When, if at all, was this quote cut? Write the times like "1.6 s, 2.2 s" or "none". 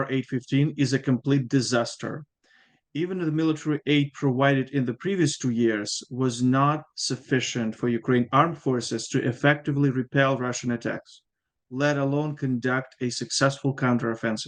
none